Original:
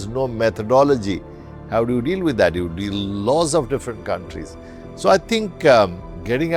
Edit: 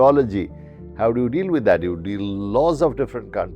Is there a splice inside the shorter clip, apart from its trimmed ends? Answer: no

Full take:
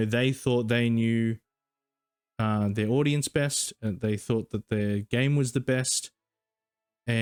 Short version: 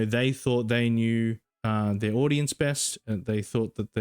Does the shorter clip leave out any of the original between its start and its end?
yes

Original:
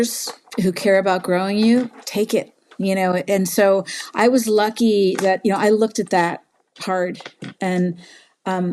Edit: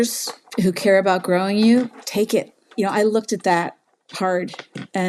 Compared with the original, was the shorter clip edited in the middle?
yes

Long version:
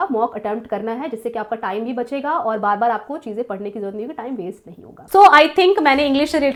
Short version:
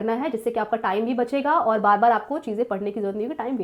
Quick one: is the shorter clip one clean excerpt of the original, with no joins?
yes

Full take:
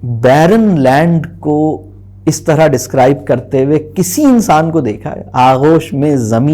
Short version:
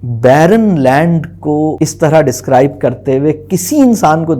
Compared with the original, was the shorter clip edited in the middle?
yes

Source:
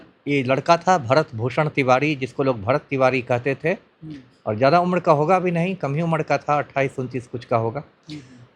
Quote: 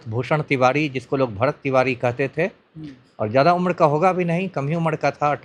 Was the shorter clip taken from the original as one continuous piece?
yes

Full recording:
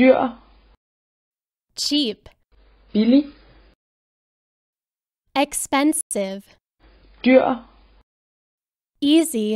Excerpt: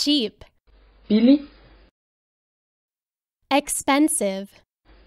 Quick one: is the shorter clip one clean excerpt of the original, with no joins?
no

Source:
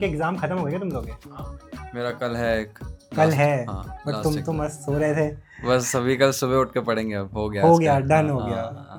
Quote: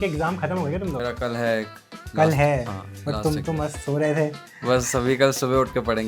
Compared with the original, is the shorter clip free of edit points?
no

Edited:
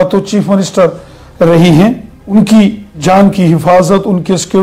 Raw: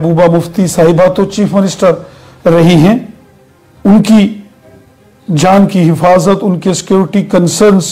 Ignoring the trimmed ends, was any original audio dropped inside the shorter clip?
yes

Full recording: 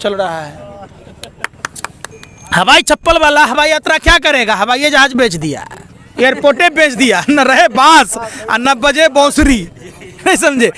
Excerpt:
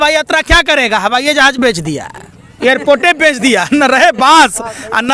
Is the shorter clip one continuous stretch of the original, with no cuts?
yes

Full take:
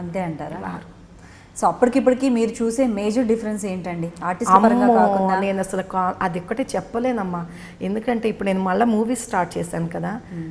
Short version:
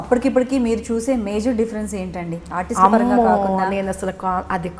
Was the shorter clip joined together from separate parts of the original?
no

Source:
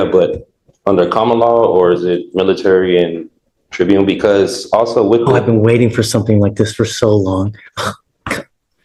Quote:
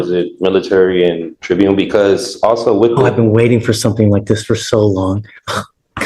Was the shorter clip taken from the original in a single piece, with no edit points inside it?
no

